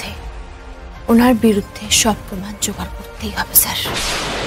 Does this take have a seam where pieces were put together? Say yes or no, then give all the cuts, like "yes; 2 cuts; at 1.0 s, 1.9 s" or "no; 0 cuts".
no; 0 cuts